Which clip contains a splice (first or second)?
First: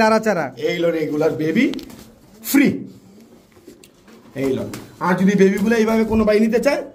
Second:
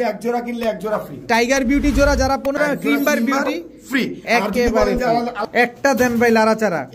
second